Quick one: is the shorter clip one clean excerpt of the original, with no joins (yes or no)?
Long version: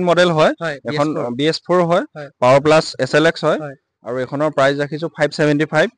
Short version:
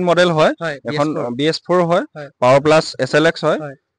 yes